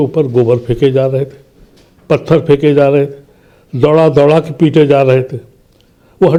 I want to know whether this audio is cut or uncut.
uncut